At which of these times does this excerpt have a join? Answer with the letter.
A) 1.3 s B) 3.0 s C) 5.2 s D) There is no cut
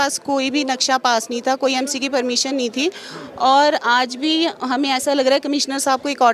D